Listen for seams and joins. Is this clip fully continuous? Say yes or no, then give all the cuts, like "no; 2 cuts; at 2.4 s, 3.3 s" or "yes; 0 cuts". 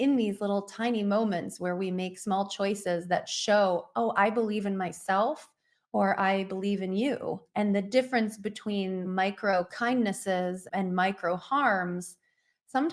no; 2 cuts; at 7.4 s, 9.1 s